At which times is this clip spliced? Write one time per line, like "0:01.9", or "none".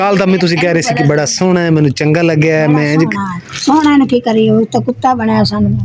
none